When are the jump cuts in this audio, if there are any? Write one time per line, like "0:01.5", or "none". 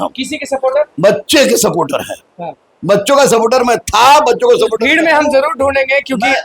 none